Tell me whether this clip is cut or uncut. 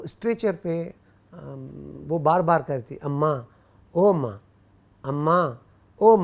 uncut